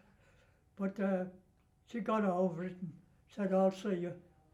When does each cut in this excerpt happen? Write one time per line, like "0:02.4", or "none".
none